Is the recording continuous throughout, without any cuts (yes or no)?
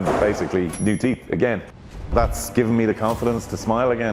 no